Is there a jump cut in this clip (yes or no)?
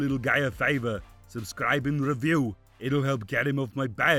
no